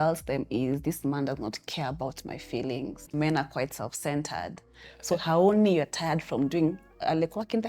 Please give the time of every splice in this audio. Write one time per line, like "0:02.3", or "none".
0:03.1

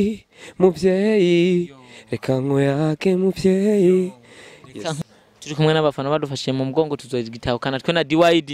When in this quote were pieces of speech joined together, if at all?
0:05.0

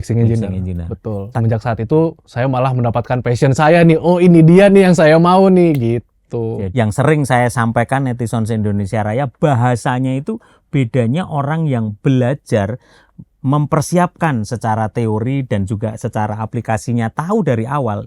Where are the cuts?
0:01.3
0:06.6

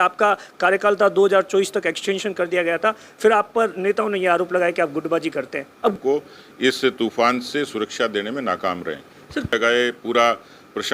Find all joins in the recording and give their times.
0:05.9
0:09.5

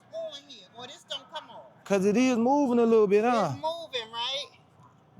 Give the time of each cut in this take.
0:01.8

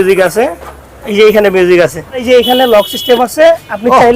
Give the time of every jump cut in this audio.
0:02.2

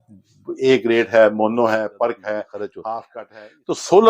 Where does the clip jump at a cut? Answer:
0:03.1

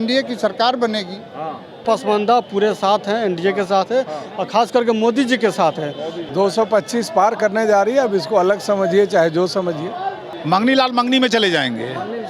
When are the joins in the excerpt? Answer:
0:01.8
0:06.2
0:10.3

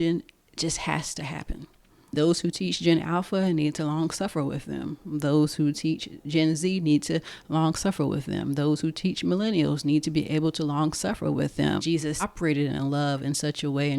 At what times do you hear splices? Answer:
0:02.2
0:12.3

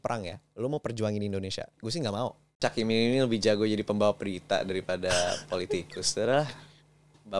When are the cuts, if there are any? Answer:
0:02.0

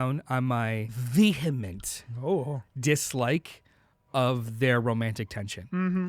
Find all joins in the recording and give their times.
0:01.0

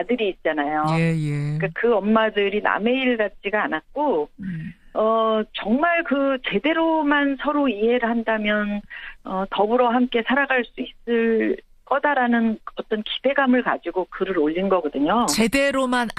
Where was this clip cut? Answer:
none

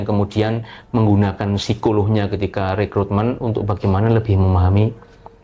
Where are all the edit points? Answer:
none

